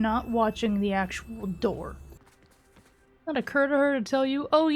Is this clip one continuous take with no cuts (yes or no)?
no